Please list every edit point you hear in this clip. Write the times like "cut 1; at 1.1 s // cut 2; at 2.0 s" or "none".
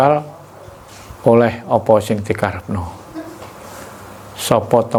none